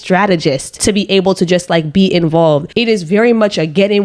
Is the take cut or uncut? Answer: uncut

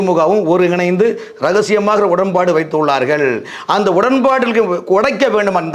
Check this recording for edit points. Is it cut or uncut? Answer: uncut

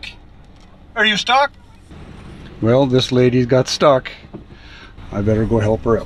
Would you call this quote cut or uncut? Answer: uncut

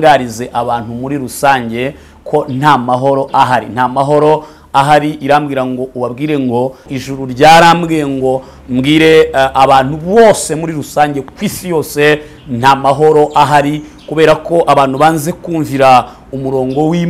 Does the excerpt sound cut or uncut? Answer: cut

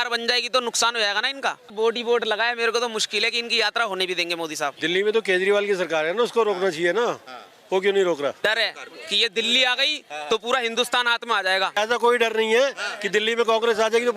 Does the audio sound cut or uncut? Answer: cut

